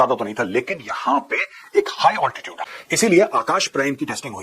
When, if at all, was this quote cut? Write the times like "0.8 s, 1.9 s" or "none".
2.8 s